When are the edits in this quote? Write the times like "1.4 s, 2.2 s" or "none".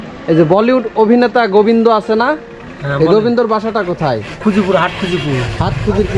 none